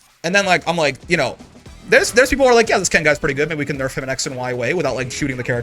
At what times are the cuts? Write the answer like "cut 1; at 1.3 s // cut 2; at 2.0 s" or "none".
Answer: none

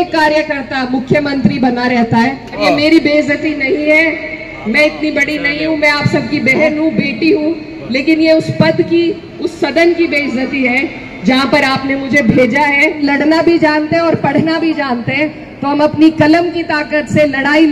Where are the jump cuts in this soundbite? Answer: cut 1; at 2.6 s // cut 2; at 13.0 s

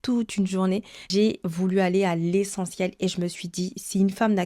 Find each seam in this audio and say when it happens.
cut 1; at 1.0 s

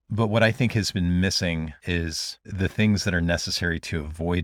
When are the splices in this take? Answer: none

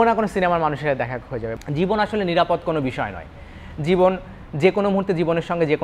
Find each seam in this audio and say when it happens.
cut 1; at 1.5 s

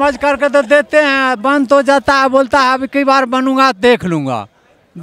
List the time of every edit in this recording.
none

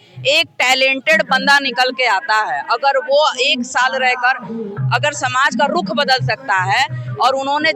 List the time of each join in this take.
none

